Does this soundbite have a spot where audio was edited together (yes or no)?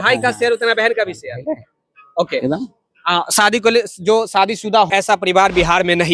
yes